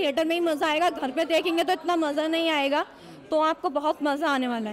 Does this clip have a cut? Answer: no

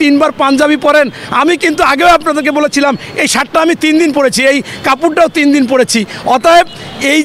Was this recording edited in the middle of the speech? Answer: no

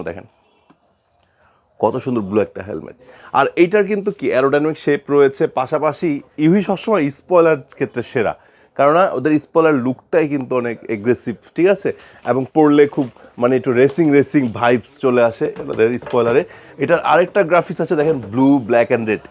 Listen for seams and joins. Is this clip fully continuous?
yes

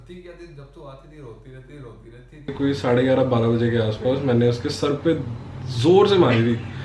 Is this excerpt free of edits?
no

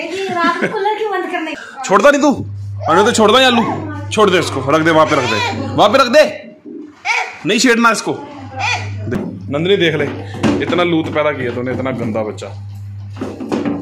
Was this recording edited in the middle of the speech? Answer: yes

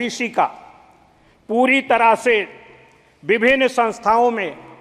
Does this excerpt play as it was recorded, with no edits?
yes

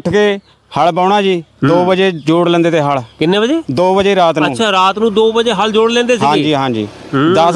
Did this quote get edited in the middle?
no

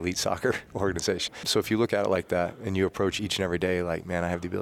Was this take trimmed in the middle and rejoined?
yes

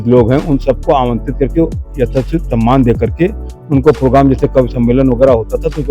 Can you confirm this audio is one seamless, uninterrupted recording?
yes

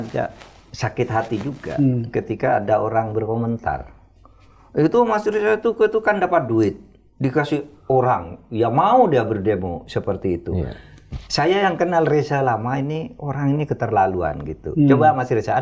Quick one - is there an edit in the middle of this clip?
no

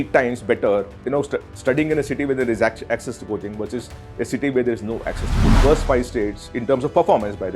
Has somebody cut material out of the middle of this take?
yes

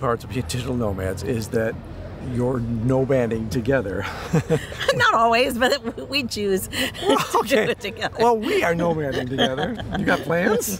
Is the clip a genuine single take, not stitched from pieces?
yes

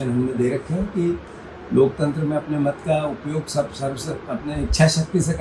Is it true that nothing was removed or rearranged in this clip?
yes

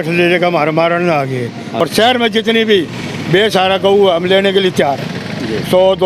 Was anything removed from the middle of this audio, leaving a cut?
yes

